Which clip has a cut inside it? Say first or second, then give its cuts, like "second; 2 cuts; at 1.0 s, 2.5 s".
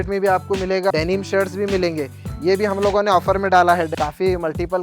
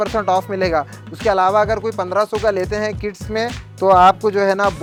first; 2 cuts; at 0.9 s, 3.9 s